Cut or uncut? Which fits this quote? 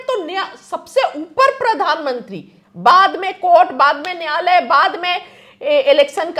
uncut